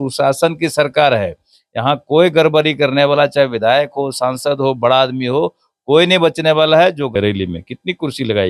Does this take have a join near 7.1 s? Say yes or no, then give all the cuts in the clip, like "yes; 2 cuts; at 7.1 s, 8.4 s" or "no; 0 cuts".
yes; 1 cut; at 7.1 s